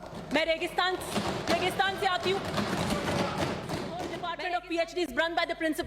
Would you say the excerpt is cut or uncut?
cut